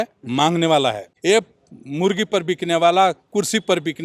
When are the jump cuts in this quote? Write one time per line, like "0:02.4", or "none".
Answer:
0:01.1